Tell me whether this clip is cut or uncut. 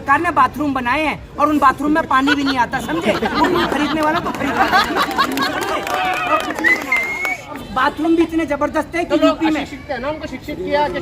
cut